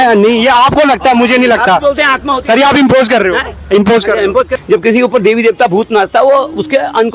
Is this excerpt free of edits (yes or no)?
no